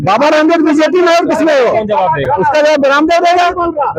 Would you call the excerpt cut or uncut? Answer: uncut